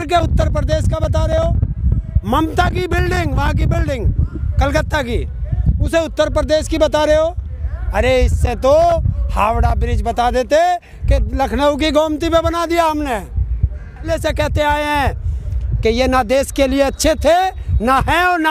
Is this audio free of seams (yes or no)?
no